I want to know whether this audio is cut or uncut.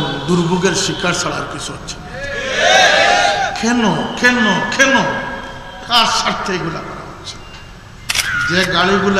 cut